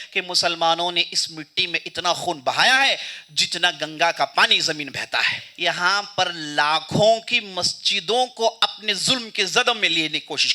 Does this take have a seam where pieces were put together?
yes; 1 cut; at 5.4 s

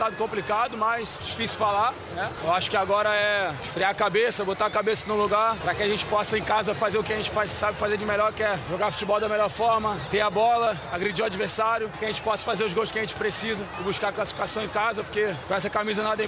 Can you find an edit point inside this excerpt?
yes; 9 cuts; at 1.2 s, 2.4 s, 3.6 s, 5.6 s, 8.6 s, 10.0 s, 11.9 s, 13.7 s, 15.4 s

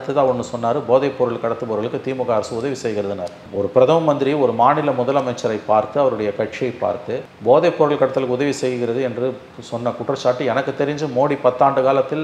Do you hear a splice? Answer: no; 0 cuts

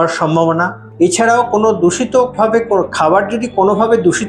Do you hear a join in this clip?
no; 0 cuts

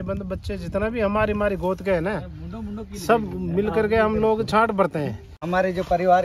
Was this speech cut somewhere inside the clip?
yes; 1 cut; at 5.3 s

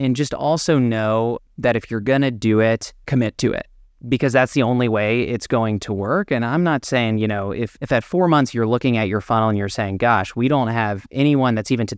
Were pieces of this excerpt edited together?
yes; 3 cuts; at 2.9 s, 3.9 s, 7.7 s

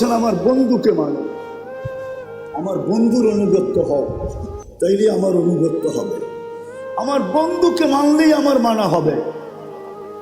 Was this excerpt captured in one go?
no; 2 cuts; at 1.3 s, 2.5 s

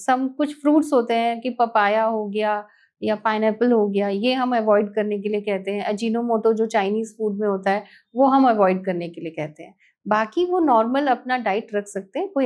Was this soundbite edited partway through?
no; 0 cuts

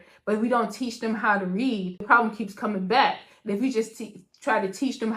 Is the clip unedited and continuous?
no; 1 cut; at 2.0 s

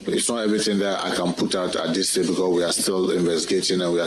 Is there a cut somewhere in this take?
no; 0 cuts

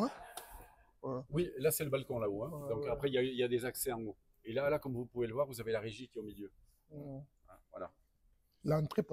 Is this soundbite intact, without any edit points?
yes; 0 cuts

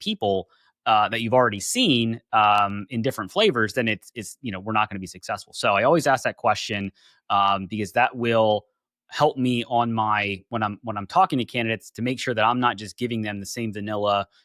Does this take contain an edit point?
no; 0 cuts

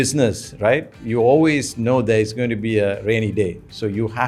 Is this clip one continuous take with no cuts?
yes; 0 cuts

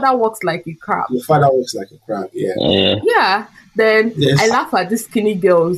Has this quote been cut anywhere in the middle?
no; 0 cuts

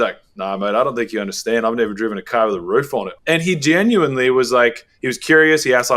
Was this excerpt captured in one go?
no; 1 cut; at 3.1 s

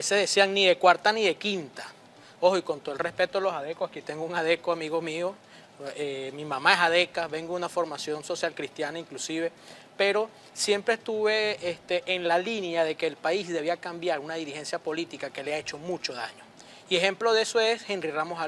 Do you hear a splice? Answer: no; 0 cuts

